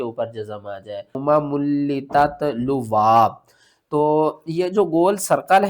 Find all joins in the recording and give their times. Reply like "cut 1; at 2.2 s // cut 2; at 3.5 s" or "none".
cut 1; at 1.1 s